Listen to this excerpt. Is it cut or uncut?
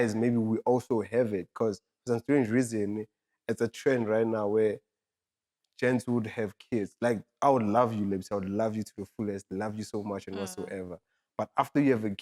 uncut